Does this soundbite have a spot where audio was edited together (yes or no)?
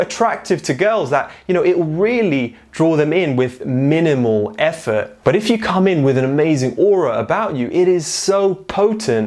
yes